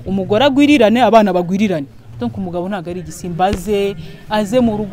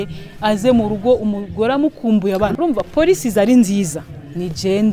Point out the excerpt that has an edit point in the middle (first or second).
second